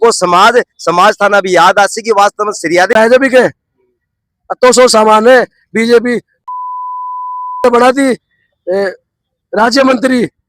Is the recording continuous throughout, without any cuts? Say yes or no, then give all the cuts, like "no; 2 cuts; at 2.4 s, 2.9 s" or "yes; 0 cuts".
no; 1 cut; at 2.9 s